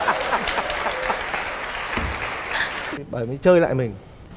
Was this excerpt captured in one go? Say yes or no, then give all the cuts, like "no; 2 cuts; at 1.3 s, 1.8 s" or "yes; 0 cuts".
no; 1 cut; at 3.0 s